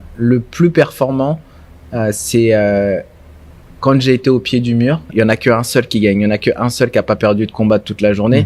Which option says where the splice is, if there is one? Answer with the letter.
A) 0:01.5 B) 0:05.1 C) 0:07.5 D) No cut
B